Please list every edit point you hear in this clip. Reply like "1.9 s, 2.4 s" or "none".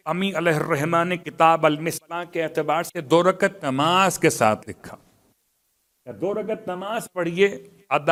none